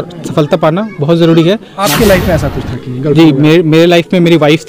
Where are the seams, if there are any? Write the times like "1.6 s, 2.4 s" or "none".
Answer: 1.7 s